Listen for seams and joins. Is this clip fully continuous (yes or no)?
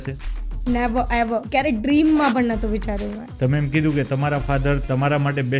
no